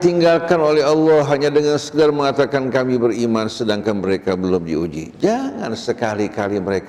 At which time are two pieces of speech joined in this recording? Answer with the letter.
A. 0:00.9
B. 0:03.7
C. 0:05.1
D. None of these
D